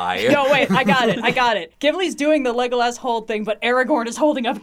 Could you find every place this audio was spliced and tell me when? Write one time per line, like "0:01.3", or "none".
0:01.5